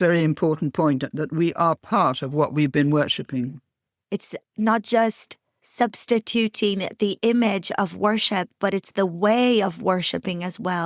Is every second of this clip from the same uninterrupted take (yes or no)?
yes